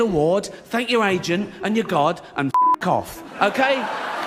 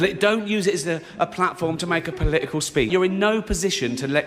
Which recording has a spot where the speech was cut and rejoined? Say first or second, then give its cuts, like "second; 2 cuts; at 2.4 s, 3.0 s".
second; 1 cut; at 2.9 s